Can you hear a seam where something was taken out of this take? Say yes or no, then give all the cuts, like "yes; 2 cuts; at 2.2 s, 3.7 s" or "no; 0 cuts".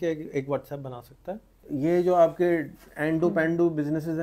yes; 1 cut; at 1.6 s